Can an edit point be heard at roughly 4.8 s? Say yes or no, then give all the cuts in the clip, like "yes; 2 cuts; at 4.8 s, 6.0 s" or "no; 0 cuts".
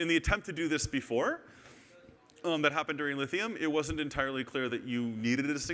no; 1 cut; at 3.1 s